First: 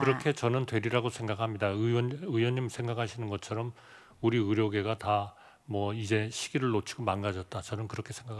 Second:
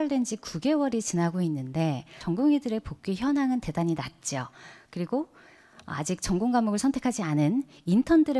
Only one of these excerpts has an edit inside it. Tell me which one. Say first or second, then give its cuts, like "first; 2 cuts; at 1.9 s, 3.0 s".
second; 1 cut; at 2.2 s